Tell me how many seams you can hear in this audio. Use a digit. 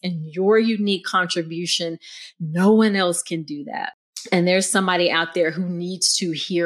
1